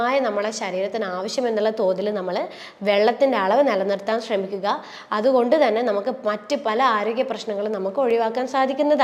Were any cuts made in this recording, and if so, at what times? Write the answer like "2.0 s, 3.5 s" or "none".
none